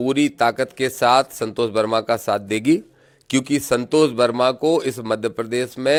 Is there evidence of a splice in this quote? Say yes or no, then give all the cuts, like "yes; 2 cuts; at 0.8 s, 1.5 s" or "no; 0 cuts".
no; 0 cuts